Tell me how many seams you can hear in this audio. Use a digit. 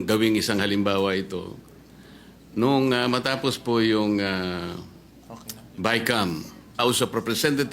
1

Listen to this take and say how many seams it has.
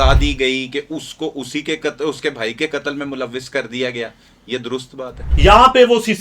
1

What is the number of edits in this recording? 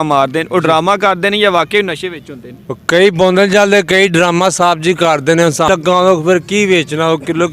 1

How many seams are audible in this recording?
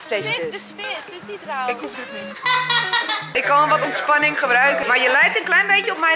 3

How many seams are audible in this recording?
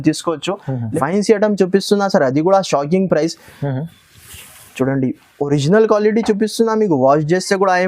1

